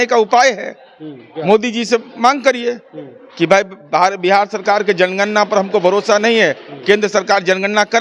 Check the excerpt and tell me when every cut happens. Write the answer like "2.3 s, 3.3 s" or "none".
none